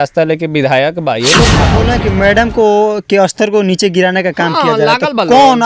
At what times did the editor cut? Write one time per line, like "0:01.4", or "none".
0:01.7